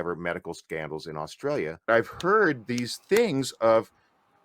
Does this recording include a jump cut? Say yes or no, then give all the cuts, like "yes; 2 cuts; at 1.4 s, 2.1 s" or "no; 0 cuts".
yes; 1 cut; at 1.9 s